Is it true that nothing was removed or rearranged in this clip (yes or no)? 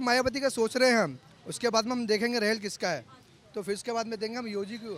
yes